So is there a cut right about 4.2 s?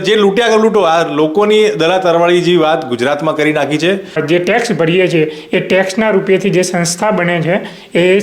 yes; 1 cut; at 4.2 s

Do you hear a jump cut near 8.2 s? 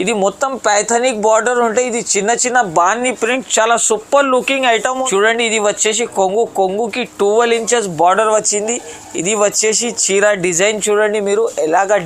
no; 1 cut; at 5.0 s

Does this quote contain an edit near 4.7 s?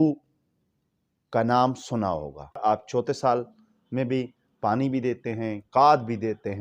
no; 1 cut; at 2.6 s

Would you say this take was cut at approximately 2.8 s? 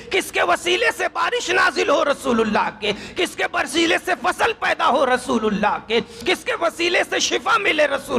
no; 0 cuts

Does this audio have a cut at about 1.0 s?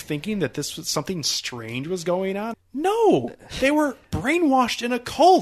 no; 1 cut; at 2.5 s

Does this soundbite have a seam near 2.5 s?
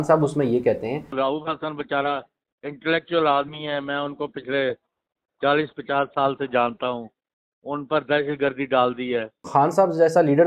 no; 2 cuts; at 1.1 s, 9.4 s

